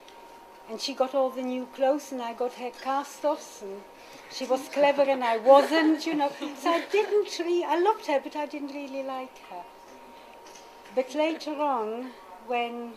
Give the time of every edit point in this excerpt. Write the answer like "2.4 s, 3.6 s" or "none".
5.9 s